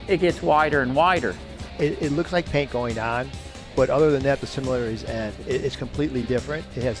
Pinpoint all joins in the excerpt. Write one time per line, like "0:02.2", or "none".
0:01.6